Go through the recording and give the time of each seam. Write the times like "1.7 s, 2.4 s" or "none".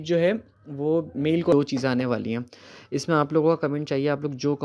1.5 s

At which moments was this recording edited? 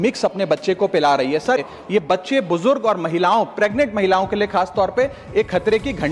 1.6 s

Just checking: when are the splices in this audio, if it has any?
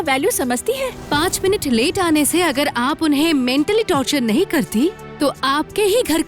1.0 s

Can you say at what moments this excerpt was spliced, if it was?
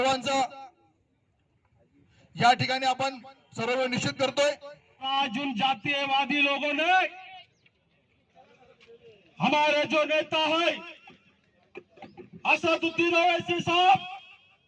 5.1 s

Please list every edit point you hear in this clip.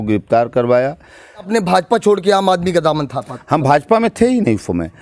1.5 s

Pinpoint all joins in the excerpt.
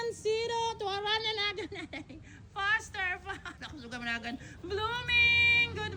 none

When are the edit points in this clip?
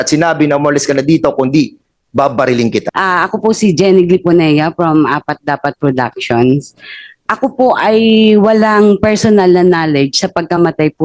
2.9 s

